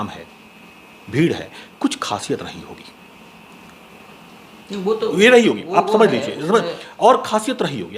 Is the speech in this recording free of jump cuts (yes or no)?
yes